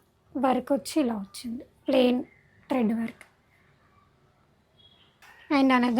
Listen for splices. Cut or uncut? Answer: uncut